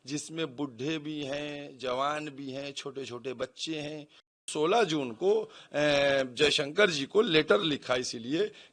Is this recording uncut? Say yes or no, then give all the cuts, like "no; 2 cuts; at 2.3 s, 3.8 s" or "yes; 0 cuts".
no; 1 cut; at 4.5 s